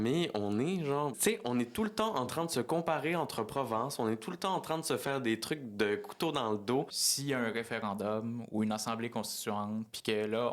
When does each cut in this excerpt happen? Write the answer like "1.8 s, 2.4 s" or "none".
1.2 s, 7.0 s